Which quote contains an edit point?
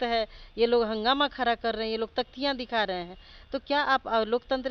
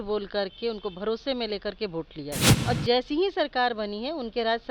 second; 1 cut; at 2.5 s

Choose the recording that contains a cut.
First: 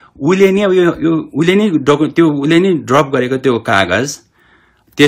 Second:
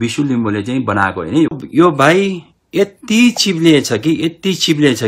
second; 1 cut; at 1.6 s

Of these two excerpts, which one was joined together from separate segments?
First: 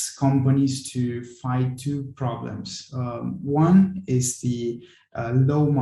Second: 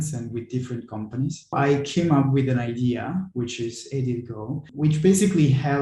second; 2 cuts; at 1.5 s, 4.7 s

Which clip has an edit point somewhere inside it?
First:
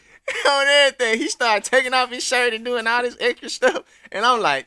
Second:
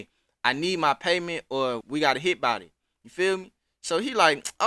second; 1 cut; at 1.8 s

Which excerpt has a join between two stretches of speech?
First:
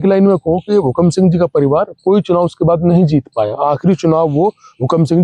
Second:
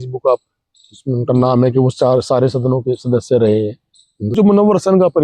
second; 1 cut; at 4.3 s

